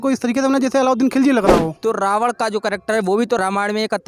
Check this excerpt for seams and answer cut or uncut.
cut